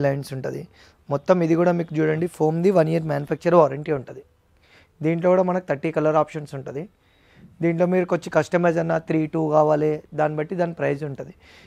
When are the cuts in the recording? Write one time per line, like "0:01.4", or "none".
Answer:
none